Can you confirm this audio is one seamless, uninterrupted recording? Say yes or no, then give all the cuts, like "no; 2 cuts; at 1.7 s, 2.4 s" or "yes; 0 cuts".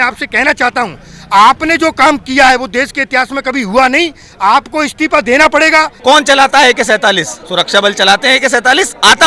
no; 2 cuts; at 5.9 s, 7.4 s